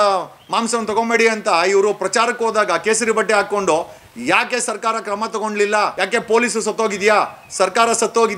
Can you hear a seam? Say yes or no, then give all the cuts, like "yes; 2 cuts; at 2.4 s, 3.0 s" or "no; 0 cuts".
yes; 1 cut; at 5.9 s